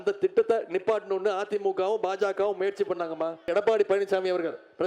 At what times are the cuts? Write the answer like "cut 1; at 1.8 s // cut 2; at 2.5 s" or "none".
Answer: cut 1; at 3.5 s